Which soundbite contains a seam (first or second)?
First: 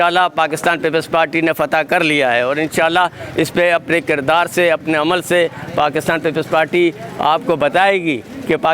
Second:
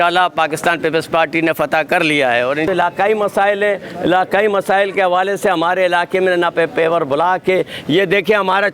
second